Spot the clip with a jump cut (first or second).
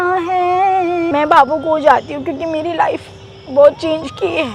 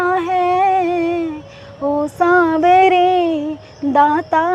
first